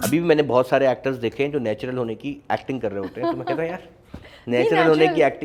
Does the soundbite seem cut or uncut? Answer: uncut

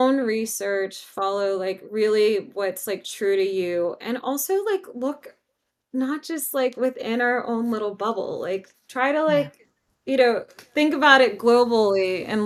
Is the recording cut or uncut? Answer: uncut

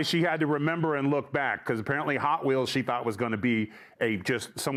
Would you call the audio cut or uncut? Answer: uncut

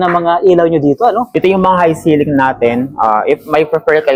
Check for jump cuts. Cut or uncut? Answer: uncut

